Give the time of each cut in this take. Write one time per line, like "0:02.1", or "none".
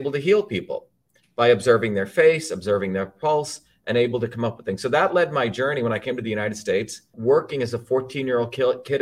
0:07.1

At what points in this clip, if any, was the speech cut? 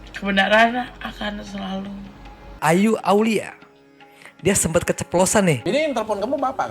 0:02.6
0:05.6

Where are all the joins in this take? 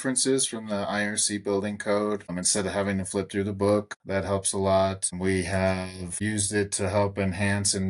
0:02.4
0:04.0
0:05.2
0:06.1

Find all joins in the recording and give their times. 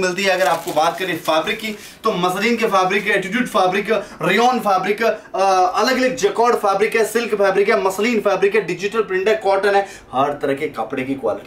none

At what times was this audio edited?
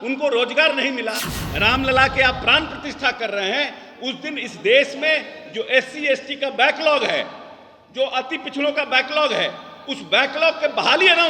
0:01.3

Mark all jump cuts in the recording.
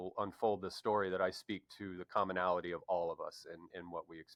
none

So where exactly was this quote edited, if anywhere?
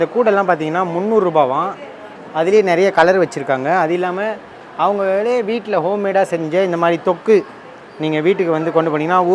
none

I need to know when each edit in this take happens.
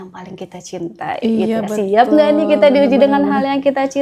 none

